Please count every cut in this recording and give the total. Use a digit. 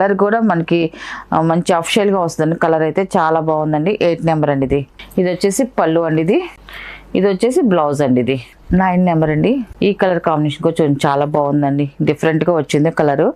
0